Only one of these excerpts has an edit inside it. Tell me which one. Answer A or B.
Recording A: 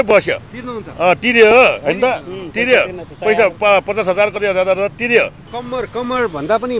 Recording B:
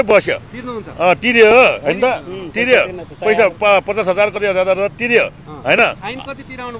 A